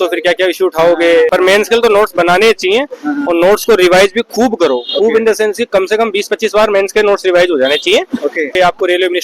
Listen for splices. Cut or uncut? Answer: cut